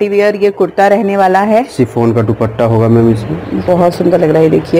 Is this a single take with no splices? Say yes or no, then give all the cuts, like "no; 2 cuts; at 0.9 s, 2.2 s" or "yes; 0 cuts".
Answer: no; 1 cut; at 3.6 s